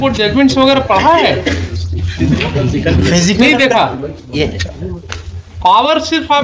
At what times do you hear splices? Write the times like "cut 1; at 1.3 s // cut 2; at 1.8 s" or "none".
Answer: none